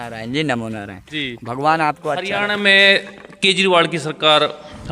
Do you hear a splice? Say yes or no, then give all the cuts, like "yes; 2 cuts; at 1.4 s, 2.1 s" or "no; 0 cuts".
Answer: yes; 1 cut; at 2.1 s